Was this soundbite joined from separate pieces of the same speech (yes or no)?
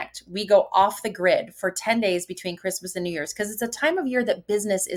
no